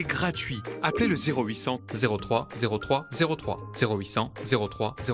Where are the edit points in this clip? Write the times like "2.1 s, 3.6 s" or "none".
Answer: none